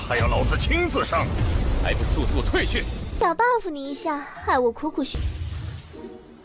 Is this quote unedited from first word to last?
no; 1 cut; at 3.1 s

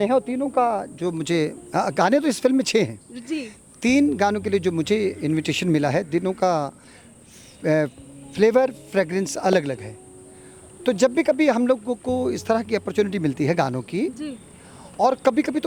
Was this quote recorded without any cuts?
yes; 0 cuts

